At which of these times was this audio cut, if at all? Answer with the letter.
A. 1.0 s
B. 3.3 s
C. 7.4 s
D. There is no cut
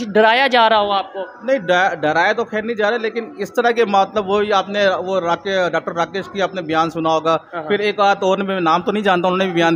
D